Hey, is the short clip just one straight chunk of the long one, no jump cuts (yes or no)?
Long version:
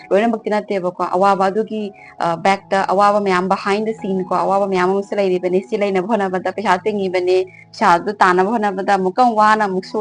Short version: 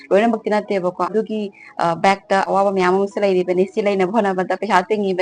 no